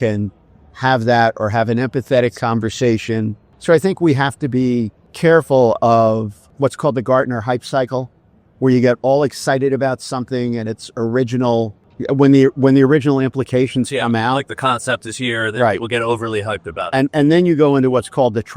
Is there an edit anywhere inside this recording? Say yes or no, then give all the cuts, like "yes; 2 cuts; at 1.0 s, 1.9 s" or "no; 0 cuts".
yes; 4 cuts; at 3.5 s, 5.0 s, 6.4 s, 11.9 s